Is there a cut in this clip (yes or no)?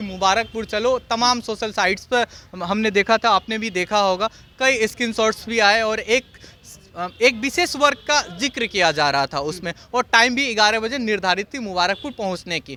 no